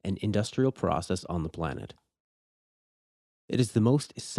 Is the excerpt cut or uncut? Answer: uncut